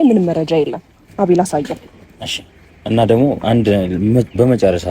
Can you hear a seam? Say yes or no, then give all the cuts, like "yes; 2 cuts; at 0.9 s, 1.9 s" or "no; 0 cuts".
yes; 1 cut; at 1.0 s